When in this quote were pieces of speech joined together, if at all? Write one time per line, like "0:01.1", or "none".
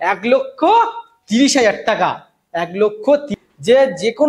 0:03.4